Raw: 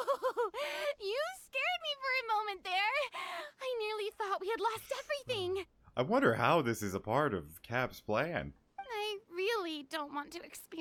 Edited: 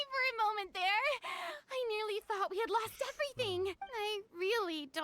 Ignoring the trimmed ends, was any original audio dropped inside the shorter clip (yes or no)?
yes